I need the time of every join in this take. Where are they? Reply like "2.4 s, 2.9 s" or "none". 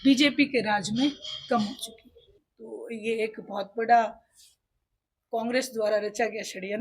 2.4 s